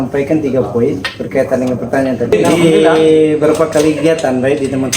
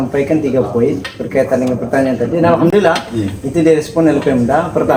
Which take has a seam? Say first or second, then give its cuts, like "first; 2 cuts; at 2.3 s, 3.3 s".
first; 1 cut; at 2.7 s